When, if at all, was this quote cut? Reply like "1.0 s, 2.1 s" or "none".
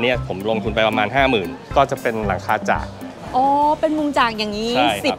none